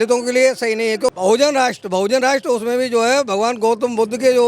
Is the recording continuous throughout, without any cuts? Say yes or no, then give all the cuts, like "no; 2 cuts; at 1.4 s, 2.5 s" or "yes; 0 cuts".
no; 1 cut; at 1.1 s